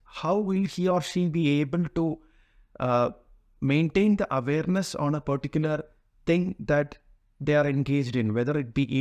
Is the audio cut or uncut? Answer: uncut